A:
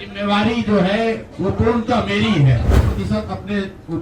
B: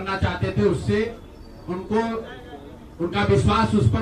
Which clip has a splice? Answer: A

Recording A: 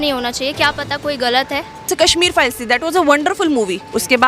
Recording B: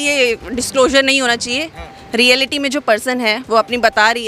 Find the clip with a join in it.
A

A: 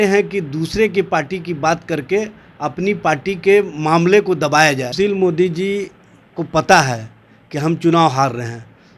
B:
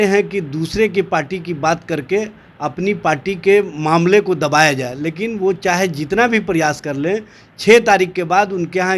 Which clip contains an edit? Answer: A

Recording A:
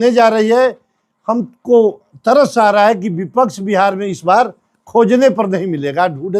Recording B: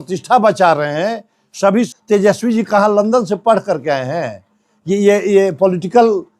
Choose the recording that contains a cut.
B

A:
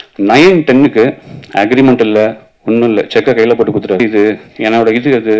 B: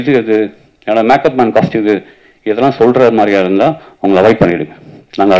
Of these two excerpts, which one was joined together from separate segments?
A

